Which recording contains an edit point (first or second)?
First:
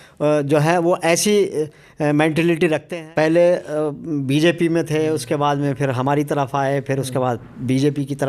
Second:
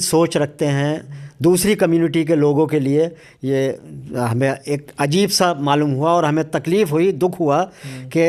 first